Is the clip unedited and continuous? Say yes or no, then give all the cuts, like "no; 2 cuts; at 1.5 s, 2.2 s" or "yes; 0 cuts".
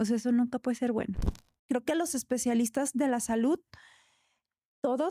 no; 1 cut; at 1.5 s